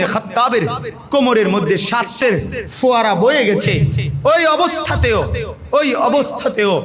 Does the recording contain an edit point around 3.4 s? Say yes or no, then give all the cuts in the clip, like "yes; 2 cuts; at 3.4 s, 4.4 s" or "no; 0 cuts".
no; 1 cut; at 2.1 s